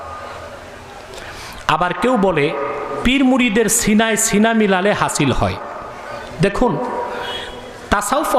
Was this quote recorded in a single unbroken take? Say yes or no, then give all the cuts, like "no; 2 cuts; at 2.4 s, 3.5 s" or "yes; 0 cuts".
yes; 0 cuts